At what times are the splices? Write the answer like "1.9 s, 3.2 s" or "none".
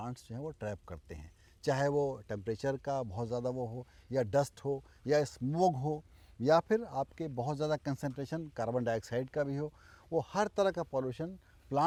none